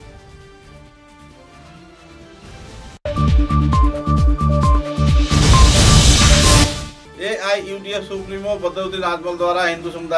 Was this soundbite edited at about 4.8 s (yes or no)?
no